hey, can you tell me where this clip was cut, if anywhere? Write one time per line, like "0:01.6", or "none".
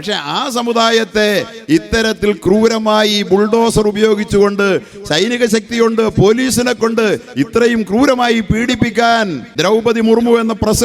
0:09.4